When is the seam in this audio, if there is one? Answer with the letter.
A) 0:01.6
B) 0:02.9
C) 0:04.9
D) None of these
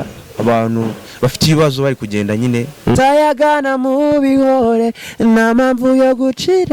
B